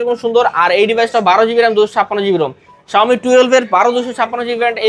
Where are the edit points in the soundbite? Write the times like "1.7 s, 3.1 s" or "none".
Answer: none